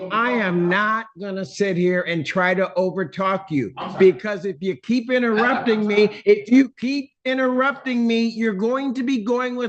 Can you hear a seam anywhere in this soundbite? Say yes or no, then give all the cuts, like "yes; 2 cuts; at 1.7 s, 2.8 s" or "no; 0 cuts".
no; 0 cuts